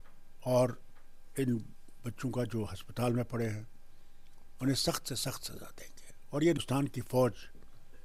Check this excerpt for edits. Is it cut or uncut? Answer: cut